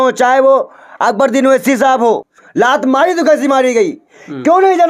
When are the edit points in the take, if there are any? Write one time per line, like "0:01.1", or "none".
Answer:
0:02.4